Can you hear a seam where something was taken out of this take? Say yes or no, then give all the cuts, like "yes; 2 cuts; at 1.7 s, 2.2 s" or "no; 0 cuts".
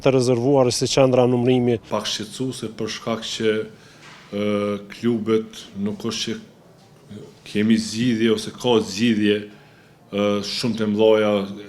yes; 1 cut; at 1.9 s